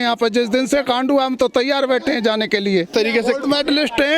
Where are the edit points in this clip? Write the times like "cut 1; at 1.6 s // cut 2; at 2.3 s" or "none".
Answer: cut 1; at 2.9 s